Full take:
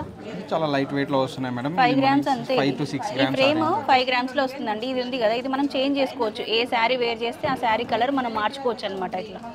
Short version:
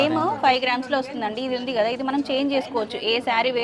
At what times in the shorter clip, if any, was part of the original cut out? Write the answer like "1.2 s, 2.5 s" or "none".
none

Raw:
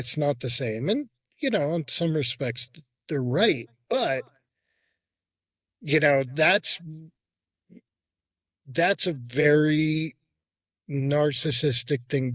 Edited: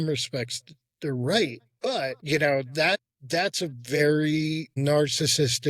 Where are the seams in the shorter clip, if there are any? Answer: 2.2 s, 3.1 s, 4.8 s

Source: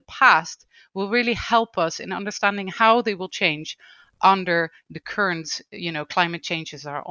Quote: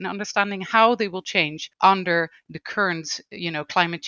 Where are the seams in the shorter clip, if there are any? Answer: 1.6 s

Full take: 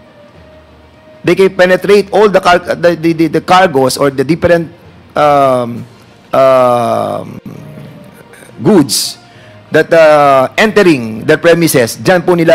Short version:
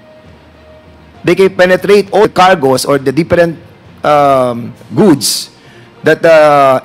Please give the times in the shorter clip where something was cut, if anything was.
2.2 s, 4.7 s

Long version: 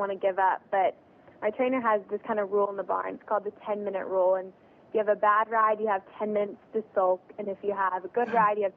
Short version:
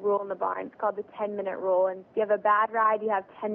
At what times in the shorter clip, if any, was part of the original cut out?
2.0 s

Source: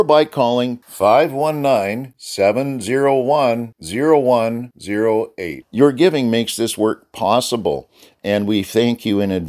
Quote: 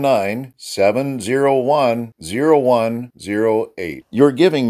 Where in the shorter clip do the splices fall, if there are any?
none

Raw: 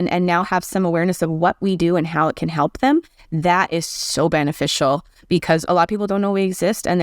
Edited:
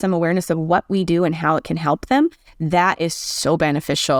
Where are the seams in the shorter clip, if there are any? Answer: none

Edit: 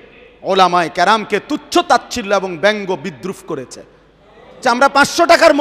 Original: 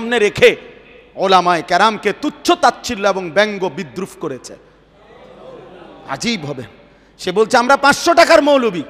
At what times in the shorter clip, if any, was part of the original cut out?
4.6 s

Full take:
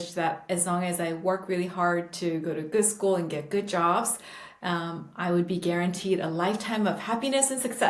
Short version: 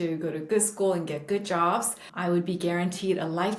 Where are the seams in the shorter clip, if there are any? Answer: 2.0 s

